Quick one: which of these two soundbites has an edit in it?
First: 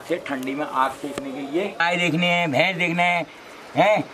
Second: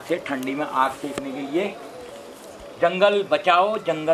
first; 1 cut; at 1.8 s

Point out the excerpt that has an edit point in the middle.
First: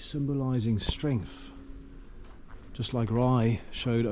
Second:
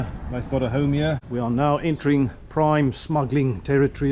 second; 1 cut; at 1.2 s

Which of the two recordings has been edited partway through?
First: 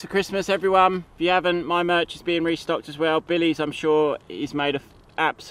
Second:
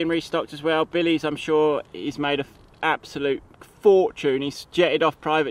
first; 1 cut; at 1.1 s

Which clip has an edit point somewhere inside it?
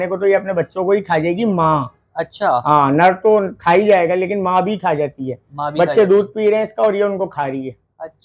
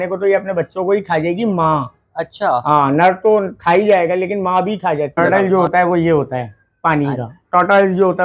second; 1 cut; at 5.1 s

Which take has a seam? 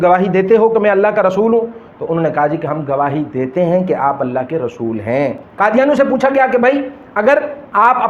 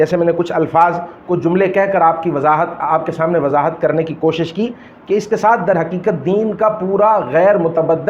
first; 1 cut; at 5.4 s

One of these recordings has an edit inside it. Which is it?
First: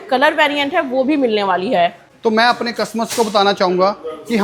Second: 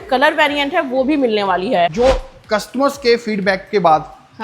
second; 1 cut; at 1.9 s

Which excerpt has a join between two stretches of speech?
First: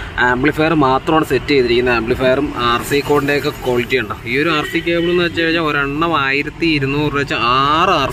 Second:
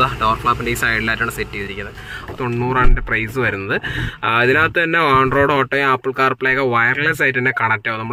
second; 1 cut; at 2.3 s

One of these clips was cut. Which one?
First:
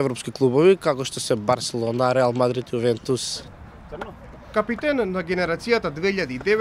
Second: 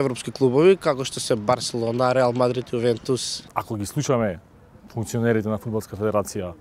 second; 1 cut; at 3.5 s

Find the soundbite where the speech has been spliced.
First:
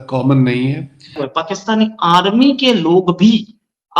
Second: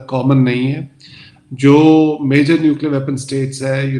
first; 1 cut; at 1.3 s

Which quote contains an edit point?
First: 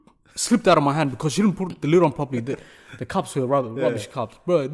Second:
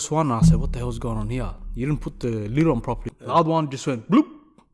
second; 1 cut; at 3.1 s

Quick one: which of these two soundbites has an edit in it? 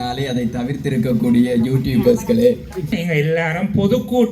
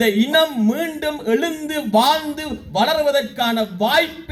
first; 1 cut; at 2.9 s

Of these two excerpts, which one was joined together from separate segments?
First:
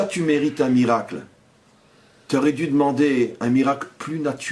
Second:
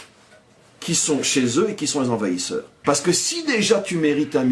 second; 1 cut; at 2.7 s

